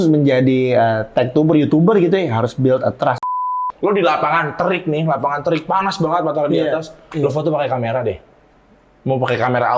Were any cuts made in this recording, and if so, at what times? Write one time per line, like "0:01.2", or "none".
0:03.3